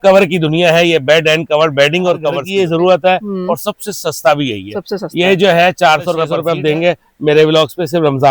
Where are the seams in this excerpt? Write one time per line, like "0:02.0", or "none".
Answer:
0:02.4
0:06.3